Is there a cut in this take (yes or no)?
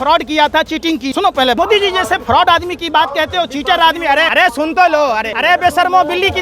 yes